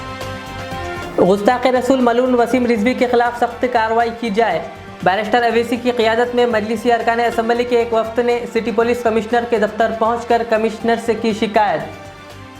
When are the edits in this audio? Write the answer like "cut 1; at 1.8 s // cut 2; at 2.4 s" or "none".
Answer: cut 1; at 1.0 s